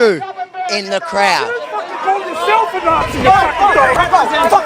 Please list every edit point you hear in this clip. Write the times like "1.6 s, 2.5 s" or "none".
1.8 s

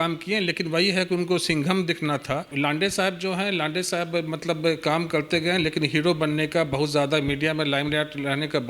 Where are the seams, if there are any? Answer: 2.5 s

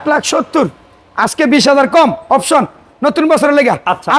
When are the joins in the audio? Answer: none

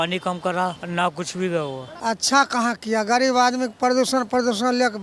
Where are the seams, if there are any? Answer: 0.8 s, 1.9 s

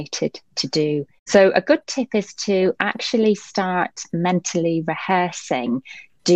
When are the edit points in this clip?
1.2 s

